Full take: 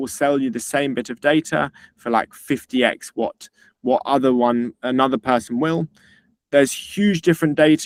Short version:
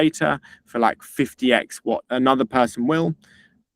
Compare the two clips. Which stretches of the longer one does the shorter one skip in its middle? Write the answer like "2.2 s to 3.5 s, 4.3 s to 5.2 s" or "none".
3.4 s to 4.8 s